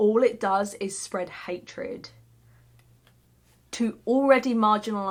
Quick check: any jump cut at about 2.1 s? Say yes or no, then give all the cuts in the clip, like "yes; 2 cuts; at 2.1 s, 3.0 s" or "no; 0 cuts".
no; 0 cuts